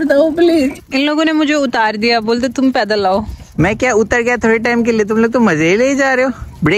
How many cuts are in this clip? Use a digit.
2